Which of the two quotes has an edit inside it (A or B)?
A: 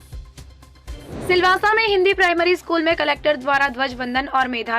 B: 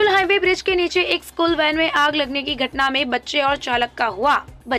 A